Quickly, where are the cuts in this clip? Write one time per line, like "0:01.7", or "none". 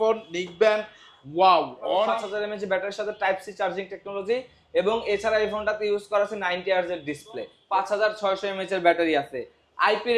0:02.2
0:07.5